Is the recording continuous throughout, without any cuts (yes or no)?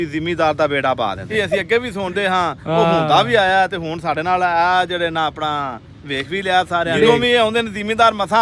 no